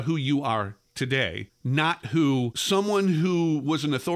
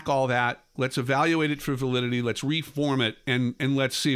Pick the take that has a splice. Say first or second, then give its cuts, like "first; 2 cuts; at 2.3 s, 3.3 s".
first; 2 cuts; at 1.5 s, 2.6 s